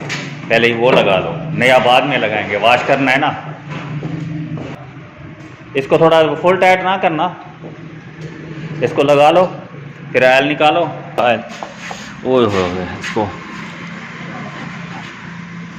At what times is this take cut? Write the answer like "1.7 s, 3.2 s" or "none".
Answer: 4.7 s, 11.2 s